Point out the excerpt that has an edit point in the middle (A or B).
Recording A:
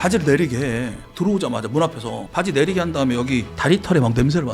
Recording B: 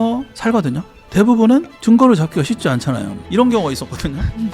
B